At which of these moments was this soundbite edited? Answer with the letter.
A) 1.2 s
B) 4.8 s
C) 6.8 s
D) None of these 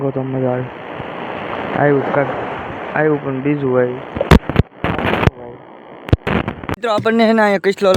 C